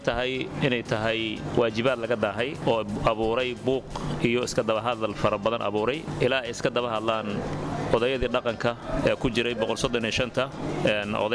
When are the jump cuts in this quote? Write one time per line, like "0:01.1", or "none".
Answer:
none